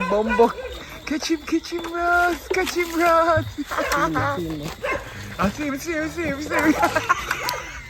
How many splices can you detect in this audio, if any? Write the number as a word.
zero